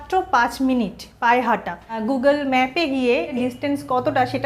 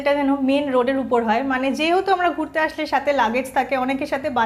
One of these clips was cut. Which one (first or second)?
first